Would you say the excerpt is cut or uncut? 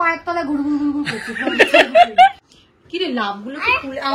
uncut